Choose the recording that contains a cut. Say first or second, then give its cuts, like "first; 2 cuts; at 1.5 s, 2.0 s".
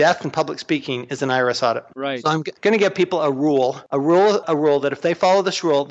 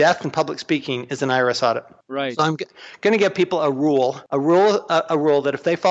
first; 2 cuts; at 2.2 s, 4.4 s